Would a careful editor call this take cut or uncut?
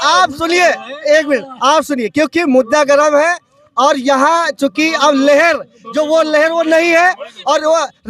uncut